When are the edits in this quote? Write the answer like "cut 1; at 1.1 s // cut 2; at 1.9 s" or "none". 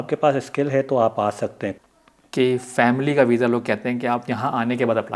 cut 1; at 1.8 s